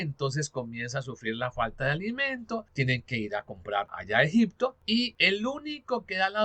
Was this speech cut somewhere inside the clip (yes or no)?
yes